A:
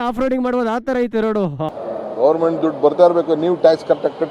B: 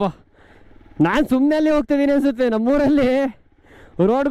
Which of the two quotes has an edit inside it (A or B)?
A